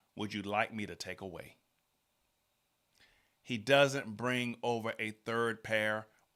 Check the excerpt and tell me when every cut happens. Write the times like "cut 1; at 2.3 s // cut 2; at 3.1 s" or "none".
none